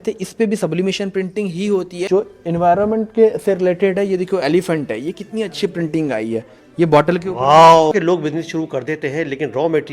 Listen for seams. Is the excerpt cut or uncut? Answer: cut